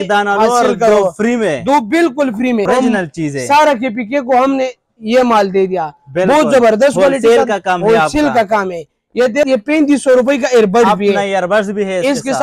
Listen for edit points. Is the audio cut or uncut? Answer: cut